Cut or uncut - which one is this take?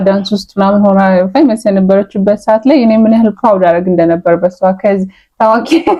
uncut